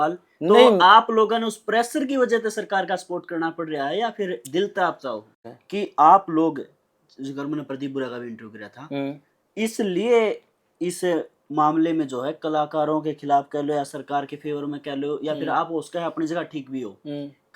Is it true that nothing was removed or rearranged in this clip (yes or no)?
no